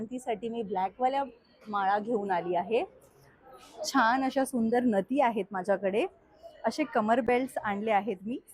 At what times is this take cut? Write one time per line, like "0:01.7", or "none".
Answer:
none